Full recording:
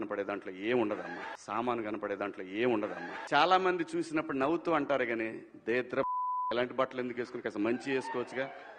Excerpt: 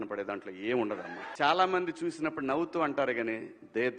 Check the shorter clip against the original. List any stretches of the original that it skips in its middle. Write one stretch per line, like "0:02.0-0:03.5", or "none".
0:00.9-0:02.8